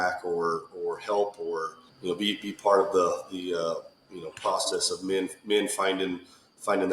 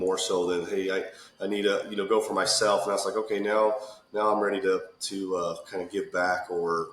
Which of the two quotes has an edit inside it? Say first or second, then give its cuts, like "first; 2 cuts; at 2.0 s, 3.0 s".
first; 1 cut; at 1.8 s